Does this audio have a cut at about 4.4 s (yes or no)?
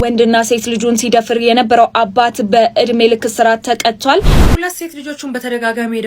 yes